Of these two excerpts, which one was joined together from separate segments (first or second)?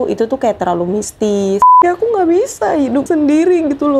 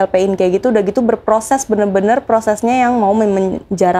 first